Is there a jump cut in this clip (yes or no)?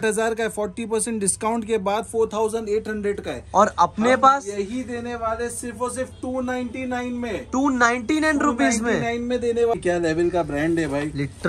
yes